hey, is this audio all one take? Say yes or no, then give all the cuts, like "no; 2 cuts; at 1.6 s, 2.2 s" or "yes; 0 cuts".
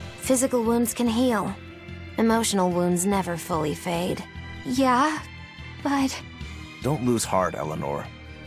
no; 1 cut; at 3.4 s